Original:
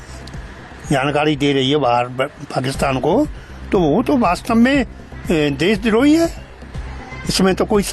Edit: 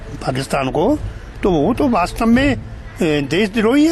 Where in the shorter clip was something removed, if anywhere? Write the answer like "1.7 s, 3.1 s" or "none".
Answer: none